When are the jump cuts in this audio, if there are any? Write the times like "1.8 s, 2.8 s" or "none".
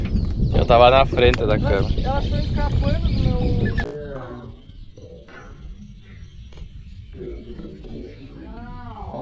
none